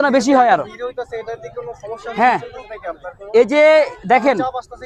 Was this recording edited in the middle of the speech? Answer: no; 0 cuts

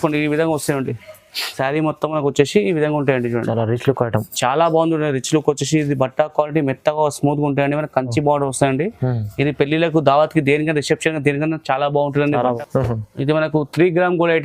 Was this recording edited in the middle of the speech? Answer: yes; 2 cuts; at 1.5 s, 12.6 s

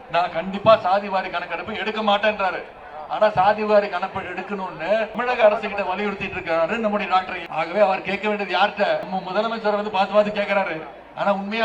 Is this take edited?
yes; 3 cuts; at 5.2 s, 7.4 s, 9.1 s

